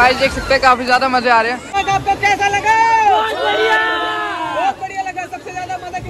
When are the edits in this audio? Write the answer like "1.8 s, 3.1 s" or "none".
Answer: 1.6 s